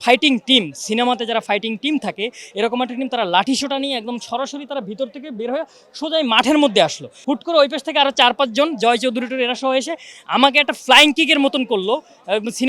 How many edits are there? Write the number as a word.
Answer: one